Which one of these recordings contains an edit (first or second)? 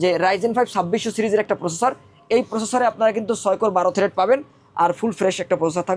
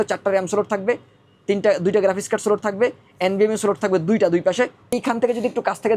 second